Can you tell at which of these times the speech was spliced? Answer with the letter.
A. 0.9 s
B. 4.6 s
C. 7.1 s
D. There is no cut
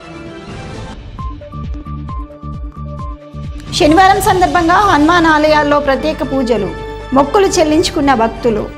A